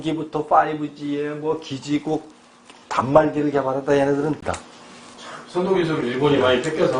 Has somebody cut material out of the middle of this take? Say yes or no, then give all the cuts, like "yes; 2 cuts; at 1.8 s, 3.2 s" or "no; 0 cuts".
yes; 1 cut; at 4.4 s